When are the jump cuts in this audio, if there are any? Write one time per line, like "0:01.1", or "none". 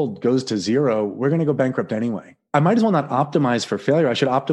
0:02.4